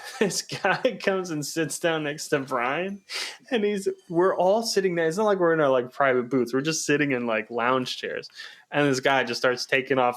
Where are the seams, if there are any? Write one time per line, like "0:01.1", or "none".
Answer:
none